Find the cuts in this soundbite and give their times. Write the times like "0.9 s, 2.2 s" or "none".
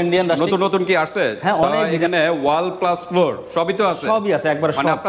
1.9 s